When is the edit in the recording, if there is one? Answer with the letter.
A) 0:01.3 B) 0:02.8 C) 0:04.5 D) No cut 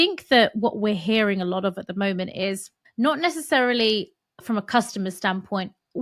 B